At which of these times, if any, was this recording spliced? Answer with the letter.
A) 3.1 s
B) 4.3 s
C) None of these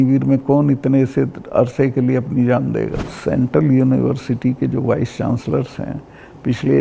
A